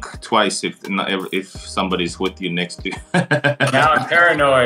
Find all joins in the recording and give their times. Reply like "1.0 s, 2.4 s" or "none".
none